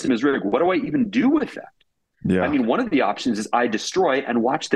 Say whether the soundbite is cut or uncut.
uncut